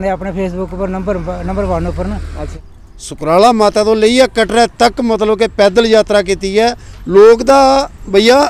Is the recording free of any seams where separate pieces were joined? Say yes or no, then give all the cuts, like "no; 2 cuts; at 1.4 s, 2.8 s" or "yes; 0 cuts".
no; 1 cut; at 2.5 s